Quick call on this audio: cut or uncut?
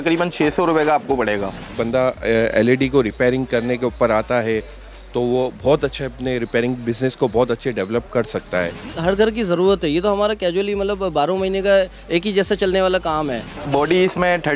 cut